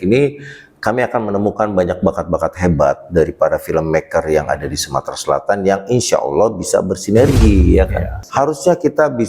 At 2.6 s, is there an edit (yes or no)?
no